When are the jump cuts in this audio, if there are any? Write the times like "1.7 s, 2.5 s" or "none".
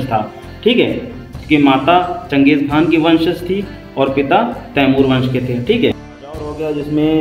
6.2 s